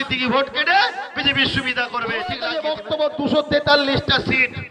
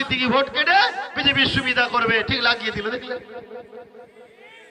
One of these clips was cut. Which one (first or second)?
first